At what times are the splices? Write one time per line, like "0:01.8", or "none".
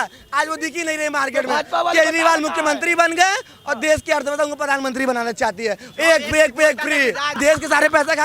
0:07.4